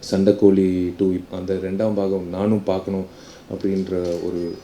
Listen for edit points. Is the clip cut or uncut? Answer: cut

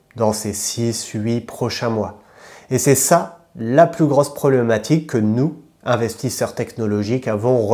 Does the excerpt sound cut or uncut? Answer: uncut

